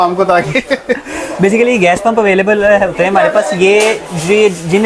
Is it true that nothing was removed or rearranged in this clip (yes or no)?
yes